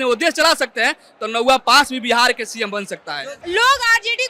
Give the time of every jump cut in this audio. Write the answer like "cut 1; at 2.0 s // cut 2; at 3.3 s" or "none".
cut 1; at 3.3 s